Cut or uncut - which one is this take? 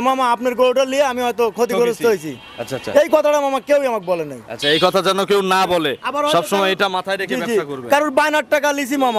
uncut